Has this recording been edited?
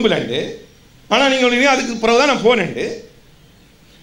no; 0 cuts

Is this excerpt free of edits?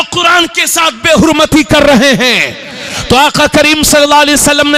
yes; 0 cuts

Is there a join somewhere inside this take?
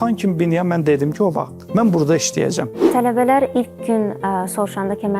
yes; 2 cuts; at 1.5 s, 2.8 s

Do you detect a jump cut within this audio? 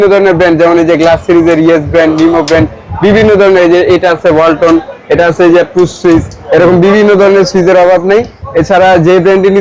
no; 0 cuts

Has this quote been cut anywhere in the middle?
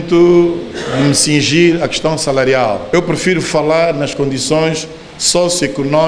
yes; 1 cut; at 2.8 s

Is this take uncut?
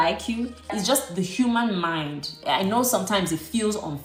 yes; 0 cuts

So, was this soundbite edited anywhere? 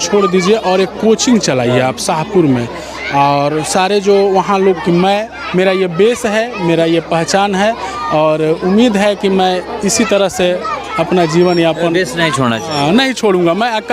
yes; 1 cut; at 4.8 s

